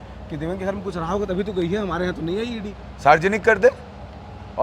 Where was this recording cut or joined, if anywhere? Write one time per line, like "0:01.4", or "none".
none